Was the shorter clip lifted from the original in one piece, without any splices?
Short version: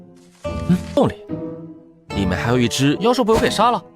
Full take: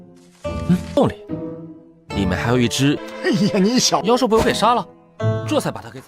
no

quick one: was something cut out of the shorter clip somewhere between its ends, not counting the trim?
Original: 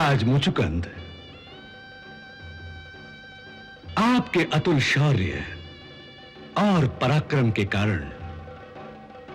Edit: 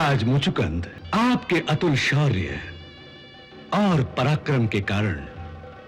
yes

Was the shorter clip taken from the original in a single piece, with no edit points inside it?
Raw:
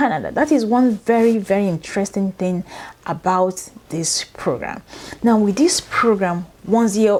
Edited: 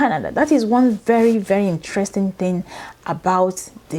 yes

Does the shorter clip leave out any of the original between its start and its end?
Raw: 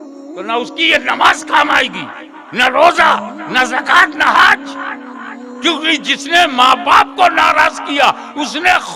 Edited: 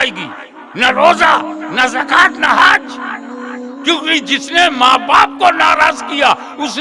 no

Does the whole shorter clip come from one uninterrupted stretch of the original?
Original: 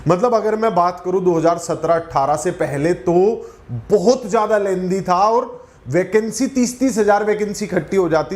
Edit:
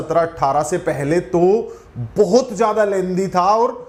yes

